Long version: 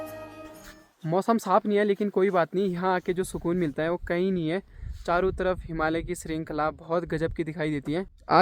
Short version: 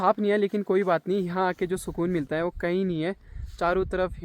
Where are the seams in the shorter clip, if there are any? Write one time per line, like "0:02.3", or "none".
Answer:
none